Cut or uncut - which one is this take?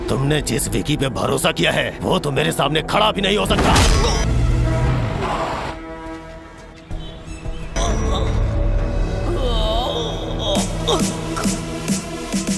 cut